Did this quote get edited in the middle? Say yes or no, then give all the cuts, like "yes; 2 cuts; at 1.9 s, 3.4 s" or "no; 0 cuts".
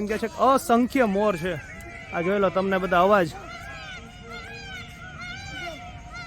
no; 0 cuts